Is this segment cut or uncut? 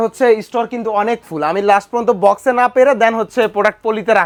uncut